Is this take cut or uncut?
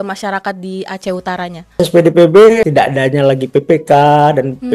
cut